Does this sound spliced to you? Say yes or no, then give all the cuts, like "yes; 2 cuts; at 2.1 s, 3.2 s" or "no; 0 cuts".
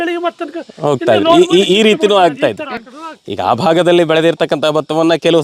no; 0 cuts